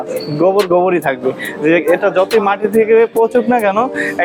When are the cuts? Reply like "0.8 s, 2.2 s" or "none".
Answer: none